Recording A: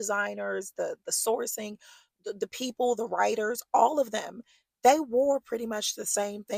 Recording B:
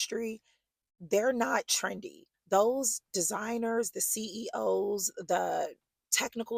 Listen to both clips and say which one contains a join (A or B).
B